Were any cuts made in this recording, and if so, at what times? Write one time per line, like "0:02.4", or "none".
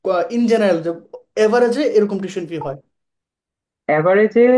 none